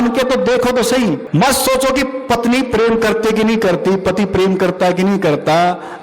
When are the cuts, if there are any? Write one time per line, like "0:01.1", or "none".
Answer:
0:01.2